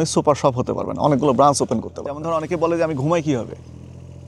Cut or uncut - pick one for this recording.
cut